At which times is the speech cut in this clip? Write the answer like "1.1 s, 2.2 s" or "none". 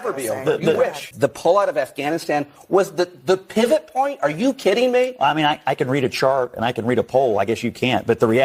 1.1 s

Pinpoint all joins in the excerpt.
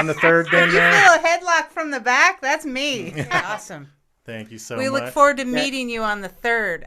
3.3 s

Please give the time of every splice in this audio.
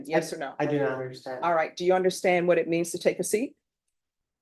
none

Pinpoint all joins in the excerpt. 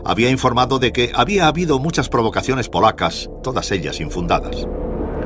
2.7 s

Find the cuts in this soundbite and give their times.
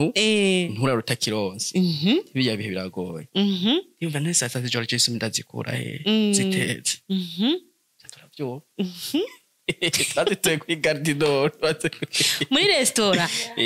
none

